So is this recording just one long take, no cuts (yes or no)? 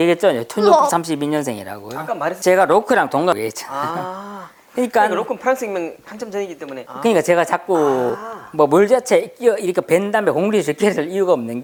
yes